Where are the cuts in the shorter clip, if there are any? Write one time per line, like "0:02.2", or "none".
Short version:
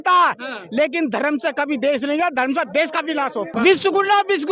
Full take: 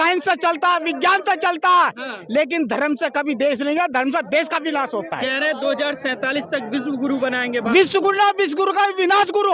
0:03.5